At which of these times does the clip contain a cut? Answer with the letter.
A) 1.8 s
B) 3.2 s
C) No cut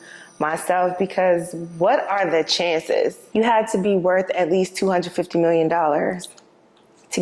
B